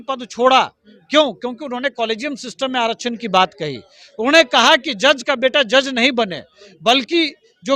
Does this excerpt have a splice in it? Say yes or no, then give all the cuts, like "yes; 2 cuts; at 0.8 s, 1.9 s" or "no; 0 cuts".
no; 0 cuts